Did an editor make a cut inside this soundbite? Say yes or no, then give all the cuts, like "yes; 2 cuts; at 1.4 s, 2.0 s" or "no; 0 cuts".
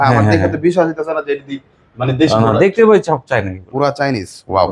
no; 0 cuts